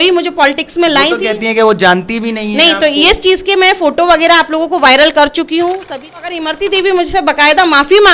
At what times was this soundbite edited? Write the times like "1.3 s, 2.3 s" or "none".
6.3 s